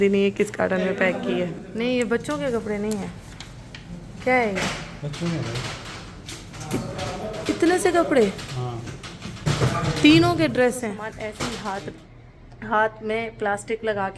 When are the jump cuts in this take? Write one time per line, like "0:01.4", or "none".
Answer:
0:01.6
0:11.2